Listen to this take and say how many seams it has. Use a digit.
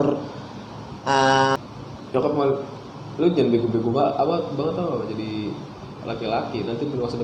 1